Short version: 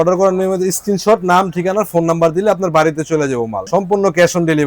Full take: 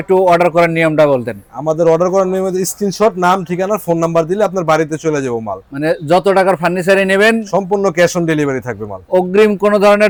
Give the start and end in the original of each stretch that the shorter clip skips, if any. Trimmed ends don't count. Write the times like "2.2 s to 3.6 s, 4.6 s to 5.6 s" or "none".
5.6 s to 7.5 s